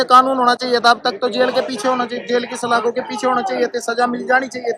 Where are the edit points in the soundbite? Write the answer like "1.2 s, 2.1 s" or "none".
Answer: none